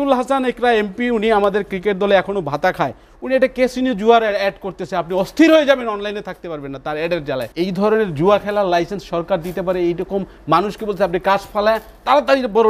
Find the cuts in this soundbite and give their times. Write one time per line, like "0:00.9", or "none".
0:07.5

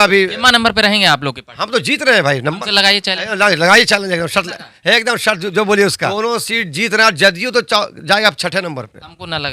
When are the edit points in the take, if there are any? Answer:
0:06.1

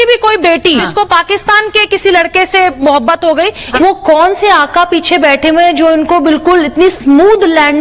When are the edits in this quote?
0:00.9
0:02.8
0:03.6

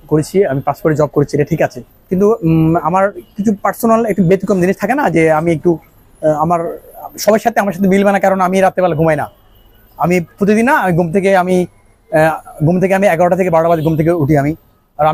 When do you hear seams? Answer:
none

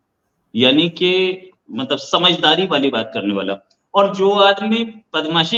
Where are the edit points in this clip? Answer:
none

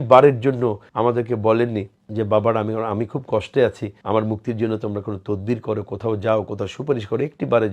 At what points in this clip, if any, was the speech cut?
0:00.8
0:02.0
0:03.9

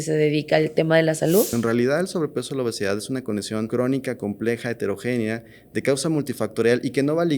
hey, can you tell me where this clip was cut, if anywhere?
0:01.5
0:03.7

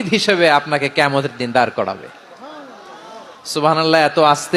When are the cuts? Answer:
none

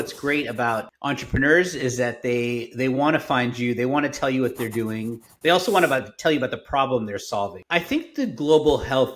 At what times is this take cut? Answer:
0:00.9
0:07.6

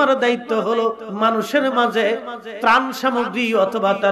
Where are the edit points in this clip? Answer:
0:01.1

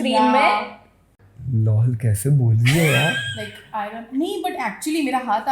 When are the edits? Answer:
0:01.2

